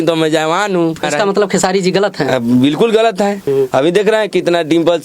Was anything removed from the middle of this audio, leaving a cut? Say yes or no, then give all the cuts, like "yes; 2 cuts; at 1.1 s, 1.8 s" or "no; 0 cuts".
yes; 2 cuts; at 1.1 s, 3.4 s